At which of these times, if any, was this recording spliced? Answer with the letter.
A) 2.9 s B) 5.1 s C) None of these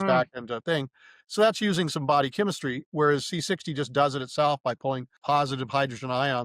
B